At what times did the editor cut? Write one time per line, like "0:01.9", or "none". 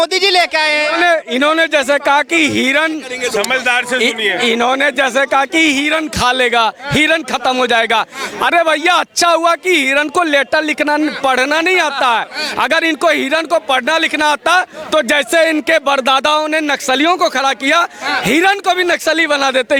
none